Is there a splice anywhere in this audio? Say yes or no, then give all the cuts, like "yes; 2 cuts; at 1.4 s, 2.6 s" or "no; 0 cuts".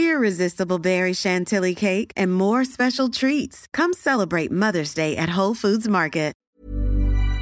yes; 1 cut; at 6.4 s